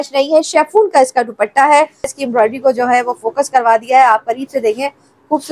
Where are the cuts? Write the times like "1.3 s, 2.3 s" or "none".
2.1 s